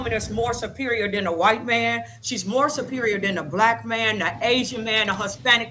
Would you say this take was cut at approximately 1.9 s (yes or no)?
no